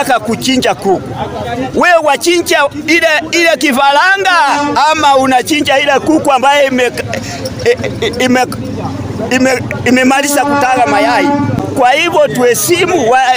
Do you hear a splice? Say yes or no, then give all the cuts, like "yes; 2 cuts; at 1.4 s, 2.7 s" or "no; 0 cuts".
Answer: yes; 1 cut; at 11.6 s